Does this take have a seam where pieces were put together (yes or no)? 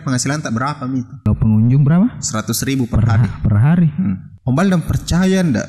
yes